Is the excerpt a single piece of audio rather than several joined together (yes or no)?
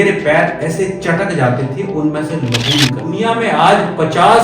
no